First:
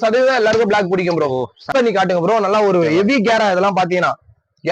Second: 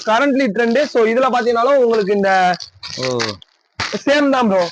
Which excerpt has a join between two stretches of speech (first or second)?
first